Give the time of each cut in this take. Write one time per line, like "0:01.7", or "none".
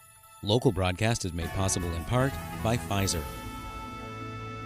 0:03.2